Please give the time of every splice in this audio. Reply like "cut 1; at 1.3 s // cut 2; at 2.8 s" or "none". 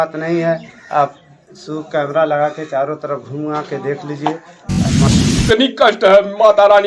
cut 1; at 5.1 s